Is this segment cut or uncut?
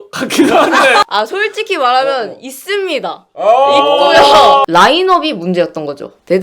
cut